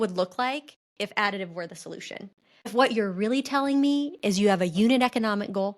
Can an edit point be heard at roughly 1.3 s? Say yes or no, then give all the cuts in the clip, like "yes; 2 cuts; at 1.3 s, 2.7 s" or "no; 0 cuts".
no; 1 cut; at 2.7 s